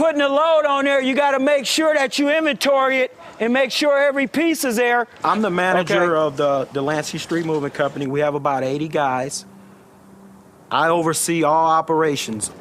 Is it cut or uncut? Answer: cut